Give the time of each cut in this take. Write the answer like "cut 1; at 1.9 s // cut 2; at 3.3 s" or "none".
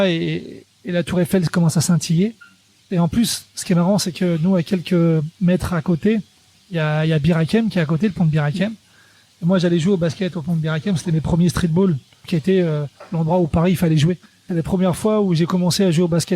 cut 1; at 2.9 s // cut 2; at 12.3 s // cut 3; at 14.4 s